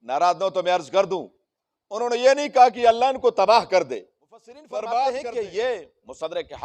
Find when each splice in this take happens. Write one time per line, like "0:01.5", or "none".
0:05.2